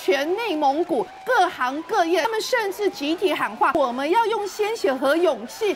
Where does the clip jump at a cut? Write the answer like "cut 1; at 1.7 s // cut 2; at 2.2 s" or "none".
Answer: cut 1; at 1.2 s // cut 2; at 2.3 s // cut 3; at 3.8 s